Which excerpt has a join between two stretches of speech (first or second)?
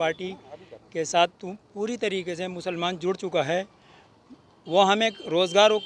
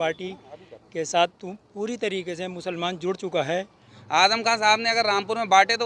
second